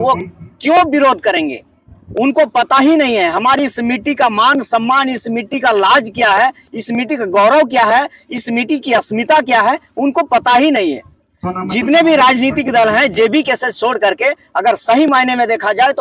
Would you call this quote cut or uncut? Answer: uncut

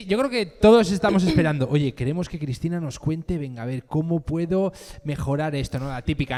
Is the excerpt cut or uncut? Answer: uncut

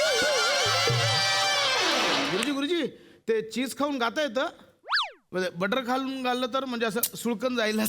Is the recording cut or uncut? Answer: cut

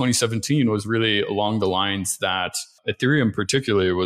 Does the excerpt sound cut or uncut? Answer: cut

